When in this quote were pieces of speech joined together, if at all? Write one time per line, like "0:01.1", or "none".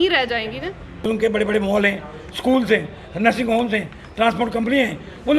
0:01.1

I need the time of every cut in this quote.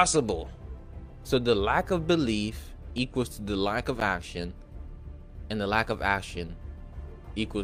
none

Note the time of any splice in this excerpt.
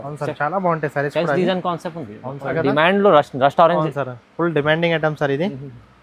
0:02.5

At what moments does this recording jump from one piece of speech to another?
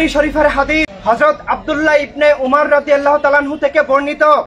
0:00.9

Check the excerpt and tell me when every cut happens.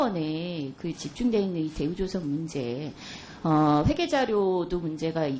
0:01.8

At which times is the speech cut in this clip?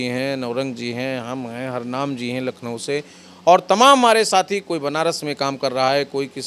none

